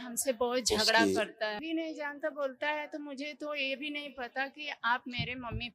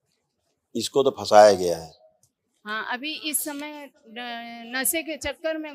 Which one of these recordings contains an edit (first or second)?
first